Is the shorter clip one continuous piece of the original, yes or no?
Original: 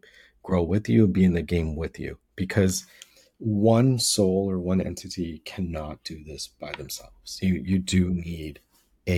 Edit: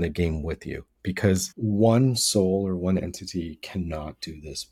no